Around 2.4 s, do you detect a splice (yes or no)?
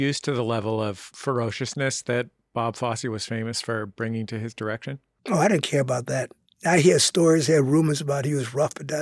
no